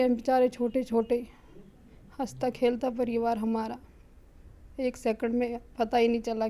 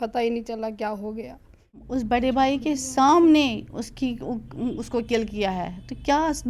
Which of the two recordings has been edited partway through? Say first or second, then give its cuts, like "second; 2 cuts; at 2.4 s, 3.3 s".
second; 1 cut; at 1.8 s